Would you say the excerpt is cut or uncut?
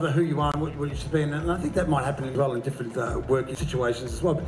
cut